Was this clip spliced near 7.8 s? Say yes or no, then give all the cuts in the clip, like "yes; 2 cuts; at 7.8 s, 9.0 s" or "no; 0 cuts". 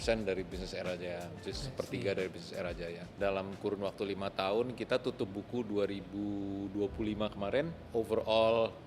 yes; 2 cuts; at 3.2 s, 7.8 s